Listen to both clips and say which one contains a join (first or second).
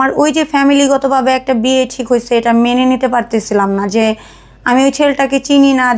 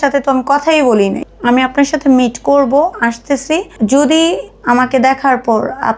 second